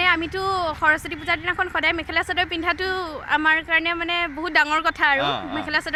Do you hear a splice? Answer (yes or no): no